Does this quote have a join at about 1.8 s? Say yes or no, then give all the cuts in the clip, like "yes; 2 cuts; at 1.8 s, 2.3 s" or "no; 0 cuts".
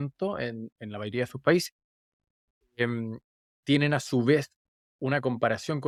no; 0 cuts